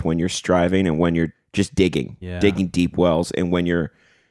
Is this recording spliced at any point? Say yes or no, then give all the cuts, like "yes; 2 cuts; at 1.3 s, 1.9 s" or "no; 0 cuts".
yes; 1 cut; at 1.4 s